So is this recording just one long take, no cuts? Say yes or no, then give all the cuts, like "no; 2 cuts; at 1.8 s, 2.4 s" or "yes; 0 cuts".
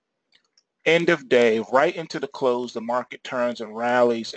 no; 1 cut; at 0.9 s